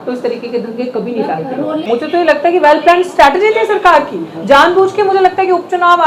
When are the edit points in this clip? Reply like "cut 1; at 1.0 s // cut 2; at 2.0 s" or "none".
cut 1; at 1.8 s